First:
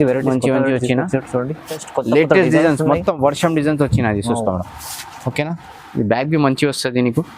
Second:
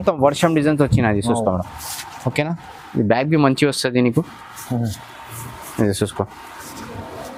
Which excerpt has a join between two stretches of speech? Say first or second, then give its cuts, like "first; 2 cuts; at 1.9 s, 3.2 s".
first; 1 cut; at 1.8 s